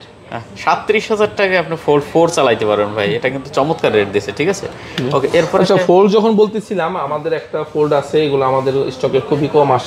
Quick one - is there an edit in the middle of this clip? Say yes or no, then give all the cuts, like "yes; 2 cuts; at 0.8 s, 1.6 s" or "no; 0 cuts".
no; 0 cuts